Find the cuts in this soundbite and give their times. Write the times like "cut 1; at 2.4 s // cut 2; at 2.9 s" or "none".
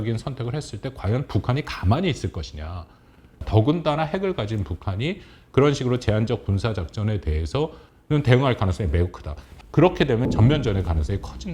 cut 1; at 3.3 s // cut 2; at 9.5 s